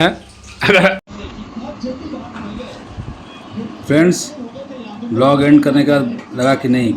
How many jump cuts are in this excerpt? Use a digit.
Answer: 1